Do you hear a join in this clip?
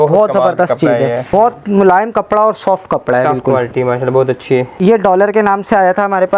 yes; 2 cuts; at 1.3 s, 4.7 s

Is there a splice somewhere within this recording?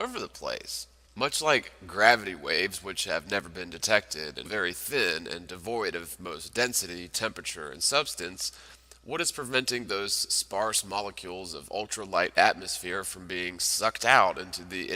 no; 0 cuts

